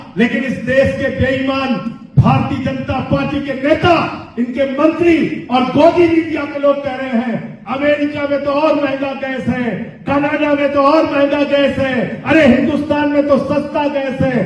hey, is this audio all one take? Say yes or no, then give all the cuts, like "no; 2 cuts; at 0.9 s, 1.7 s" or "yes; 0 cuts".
yes; 0 cuts